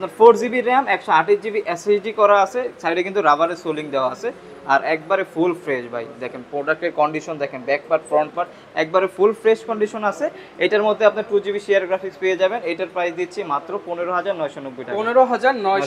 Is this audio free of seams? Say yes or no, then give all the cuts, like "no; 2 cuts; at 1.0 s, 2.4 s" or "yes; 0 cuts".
yes; 0 cuts